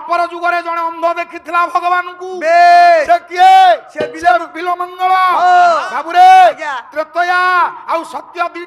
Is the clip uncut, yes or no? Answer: yes